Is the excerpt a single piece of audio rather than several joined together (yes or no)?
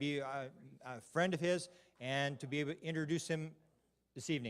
no